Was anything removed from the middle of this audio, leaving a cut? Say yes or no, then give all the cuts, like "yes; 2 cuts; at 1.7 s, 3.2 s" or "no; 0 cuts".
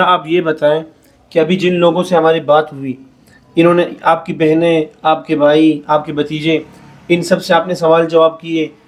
no; 0 cuts